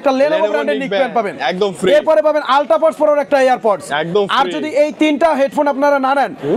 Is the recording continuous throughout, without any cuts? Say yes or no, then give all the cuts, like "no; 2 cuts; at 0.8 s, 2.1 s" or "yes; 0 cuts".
yes; 0 cuts